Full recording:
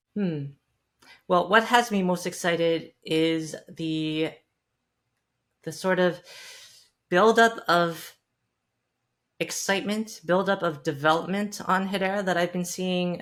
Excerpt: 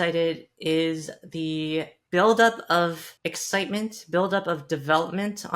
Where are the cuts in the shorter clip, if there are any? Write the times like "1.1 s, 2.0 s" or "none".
2.0 s, 3.1 s